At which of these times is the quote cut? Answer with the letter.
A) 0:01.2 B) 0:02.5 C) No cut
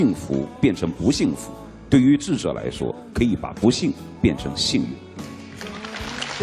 C